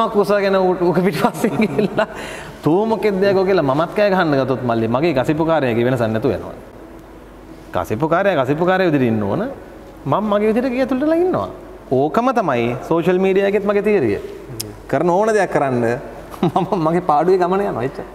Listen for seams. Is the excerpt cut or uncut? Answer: uncut